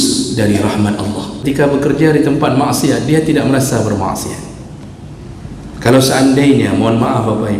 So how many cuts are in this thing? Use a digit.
1